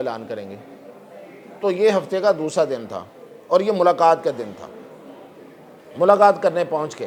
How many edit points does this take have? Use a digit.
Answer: 0